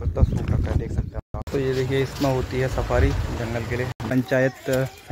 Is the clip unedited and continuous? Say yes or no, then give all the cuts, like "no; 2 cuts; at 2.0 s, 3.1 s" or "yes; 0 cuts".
no; 2 cuts; at 1.3 s, 4.0 s